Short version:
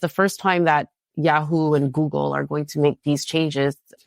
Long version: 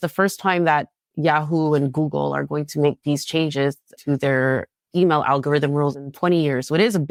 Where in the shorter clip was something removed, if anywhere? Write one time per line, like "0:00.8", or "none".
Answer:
none